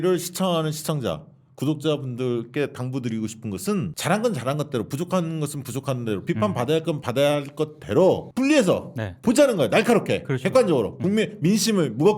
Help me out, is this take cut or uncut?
cut